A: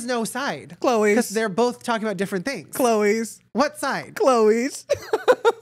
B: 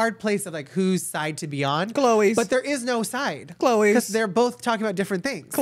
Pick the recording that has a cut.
A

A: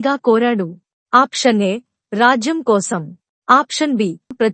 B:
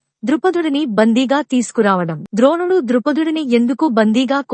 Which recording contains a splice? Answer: B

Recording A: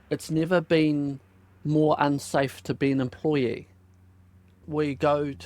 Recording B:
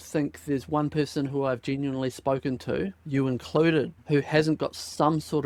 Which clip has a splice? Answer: A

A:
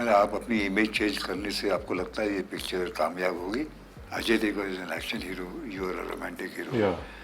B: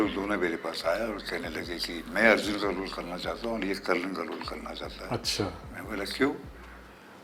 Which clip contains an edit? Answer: A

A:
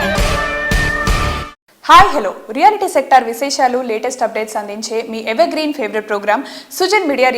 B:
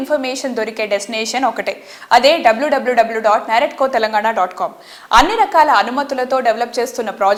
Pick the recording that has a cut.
A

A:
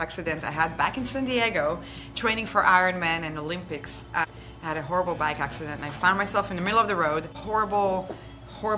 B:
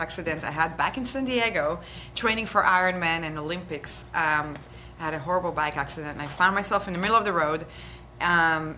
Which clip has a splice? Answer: A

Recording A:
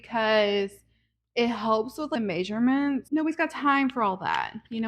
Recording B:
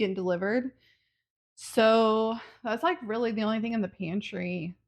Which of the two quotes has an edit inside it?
A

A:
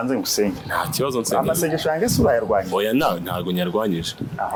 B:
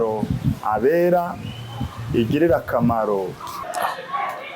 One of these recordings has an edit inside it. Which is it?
B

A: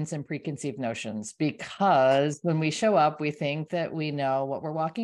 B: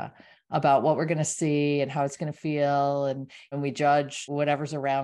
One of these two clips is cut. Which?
B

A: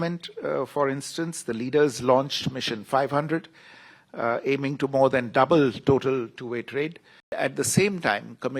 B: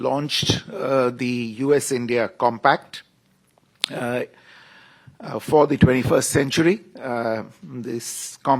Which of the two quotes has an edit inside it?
A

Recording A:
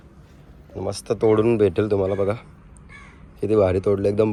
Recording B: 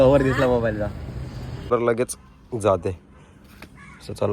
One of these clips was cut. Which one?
B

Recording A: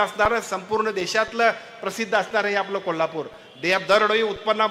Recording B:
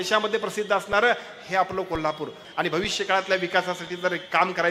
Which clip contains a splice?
B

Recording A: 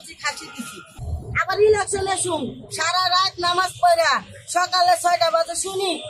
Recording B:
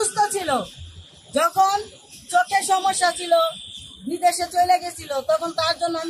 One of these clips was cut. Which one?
A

